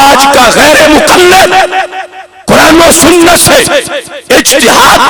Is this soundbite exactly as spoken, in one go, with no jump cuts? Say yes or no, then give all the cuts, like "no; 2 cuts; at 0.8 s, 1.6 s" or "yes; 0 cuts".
yes; 0 cuts